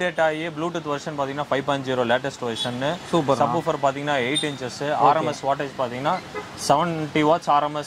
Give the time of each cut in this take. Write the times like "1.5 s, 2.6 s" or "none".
none